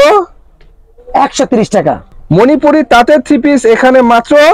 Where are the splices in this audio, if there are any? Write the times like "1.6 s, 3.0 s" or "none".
2.1 s